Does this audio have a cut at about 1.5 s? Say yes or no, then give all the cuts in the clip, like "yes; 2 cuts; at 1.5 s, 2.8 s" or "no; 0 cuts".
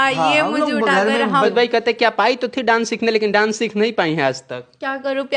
yes; 1 cut; at 1.5 s